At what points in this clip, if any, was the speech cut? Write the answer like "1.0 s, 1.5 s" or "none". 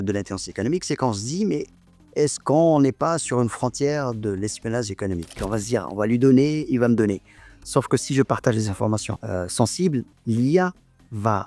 5.4 s, 9.2 s